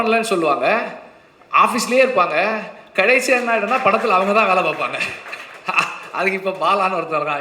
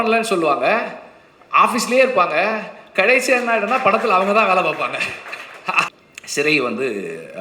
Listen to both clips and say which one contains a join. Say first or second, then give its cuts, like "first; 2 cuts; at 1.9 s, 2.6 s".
second; 1 cut; at 6.0 s